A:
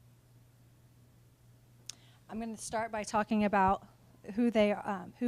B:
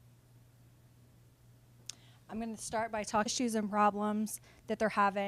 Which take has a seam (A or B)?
A